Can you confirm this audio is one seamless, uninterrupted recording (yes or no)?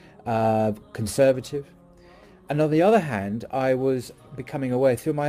yes